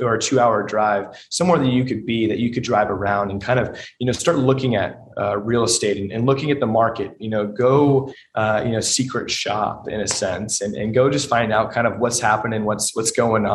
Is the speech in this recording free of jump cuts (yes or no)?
yes